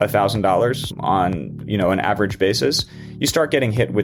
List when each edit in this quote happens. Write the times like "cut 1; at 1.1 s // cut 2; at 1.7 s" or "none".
none